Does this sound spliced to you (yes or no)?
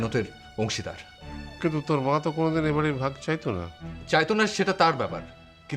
no